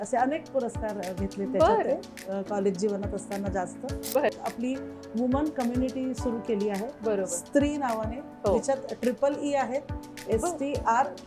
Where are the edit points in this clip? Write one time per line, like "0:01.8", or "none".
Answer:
0:04.4